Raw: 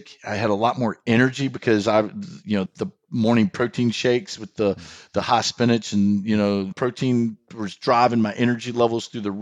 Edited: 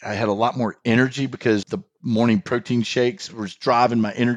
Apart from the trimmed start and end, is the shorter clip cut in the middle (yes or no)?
yes